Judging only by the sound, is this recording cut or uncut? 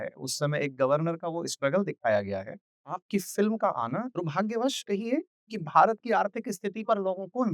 cut